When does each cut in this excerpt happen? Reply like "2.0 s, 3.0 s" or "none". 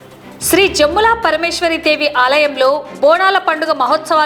none